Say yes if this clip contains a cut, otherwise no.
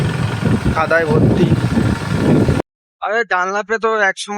yes